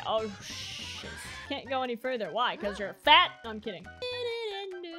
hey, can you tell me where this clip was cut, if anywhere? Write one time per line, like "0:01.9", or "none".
0:01.6
0:04.0